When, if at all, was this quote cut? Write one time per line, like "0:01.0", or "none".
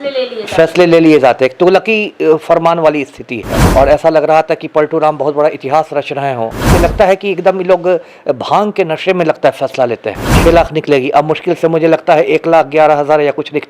0:03.5
0:06.7
0:10.4